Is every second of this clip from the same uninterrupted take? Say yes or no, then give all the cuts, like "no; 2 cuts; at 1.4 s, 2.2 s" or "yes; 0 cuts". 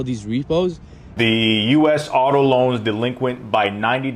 no; 1 cut; at 1.1 s